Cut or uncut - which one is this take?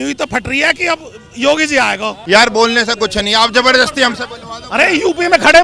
cut